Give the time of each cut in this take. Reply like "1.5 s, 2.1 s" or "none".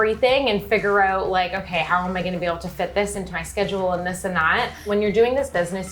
4.9 s